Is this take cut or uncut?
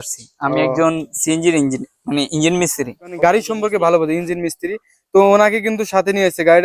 cut